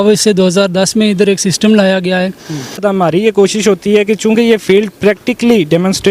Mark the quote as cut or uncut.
cut